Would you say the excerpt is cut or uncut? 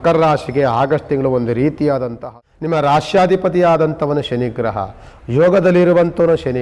cut